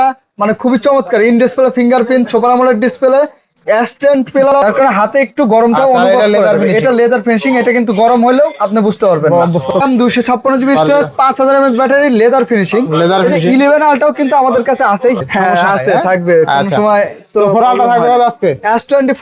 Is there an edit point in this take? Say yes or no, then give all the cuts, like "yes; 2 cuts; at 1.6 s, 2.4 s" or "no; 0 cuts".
yes; 3 cuts; at 4.6 s, 9.8 s, 15.2 s